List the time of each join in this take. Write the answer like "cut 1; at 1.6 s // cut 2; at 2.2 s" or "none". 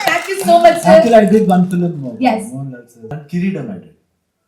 cut 1; at 3.2 s